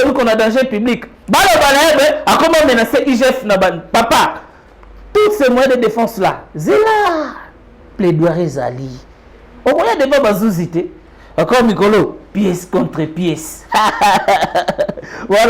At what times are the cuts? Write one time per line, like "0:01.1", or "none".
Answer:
0:01.1